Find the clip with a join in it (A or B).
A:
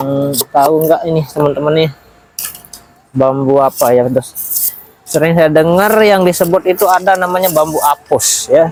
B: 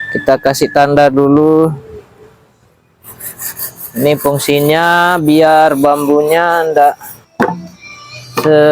B